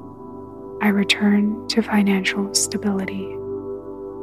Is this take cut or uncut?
cut